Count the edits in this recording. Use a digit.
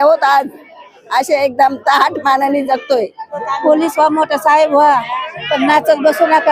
1